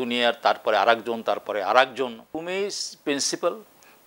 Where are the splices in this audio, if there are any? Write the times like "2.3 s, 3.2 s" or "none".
2.3 s